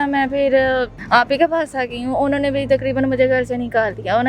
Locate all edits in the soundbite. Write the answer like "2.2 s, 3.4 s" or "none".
1.0 s